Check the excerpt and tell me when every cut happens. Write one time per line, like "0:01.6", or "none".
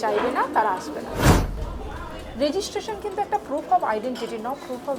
0:01.5